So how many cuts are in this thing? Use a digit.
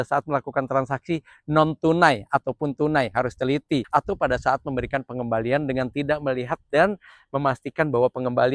1